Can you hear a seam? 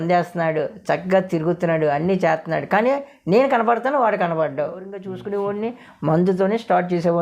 yes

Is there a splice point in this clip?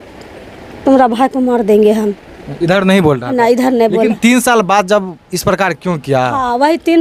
no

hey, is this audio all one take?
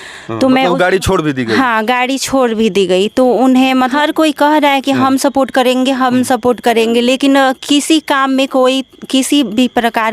no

